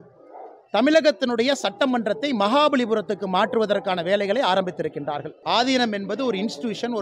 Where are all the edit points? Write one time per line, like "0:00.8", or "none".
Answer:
0:05.3